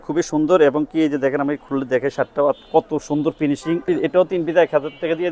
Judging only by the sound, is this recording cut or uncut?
cut